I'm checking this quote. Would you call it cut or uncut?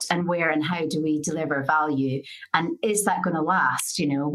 uncut